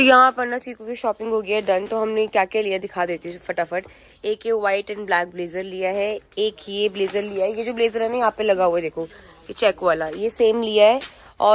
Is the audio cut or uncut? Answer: uncut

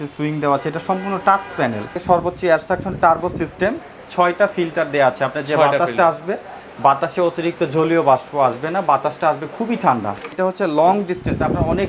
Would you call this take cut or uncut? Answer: cut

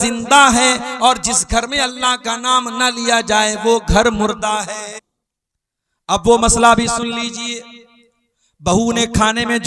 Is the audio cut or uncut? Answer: cut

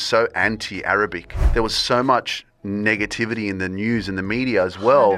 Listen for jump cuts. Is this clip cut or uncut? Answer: cut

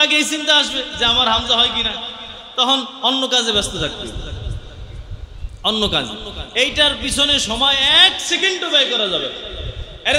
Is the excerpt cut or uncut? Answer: uncut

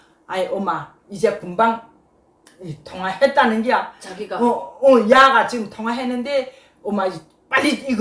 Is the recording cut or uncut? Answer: uncut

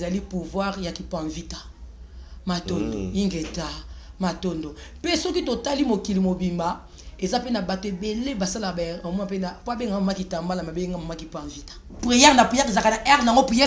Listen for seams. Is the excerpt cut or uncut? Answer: cut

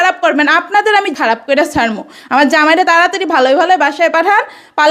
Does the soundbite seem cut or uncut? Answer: uncut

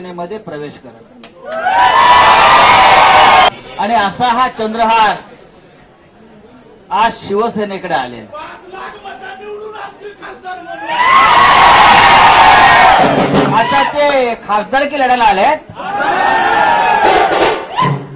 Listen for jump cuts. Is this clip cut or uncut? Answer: cut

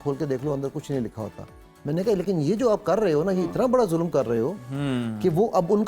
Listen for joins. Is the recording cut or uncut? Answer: uncut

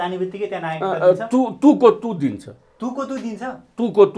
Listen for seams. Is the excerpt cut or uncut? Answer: uncut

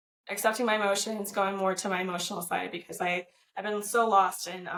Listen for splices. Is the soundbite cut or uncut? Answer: uncut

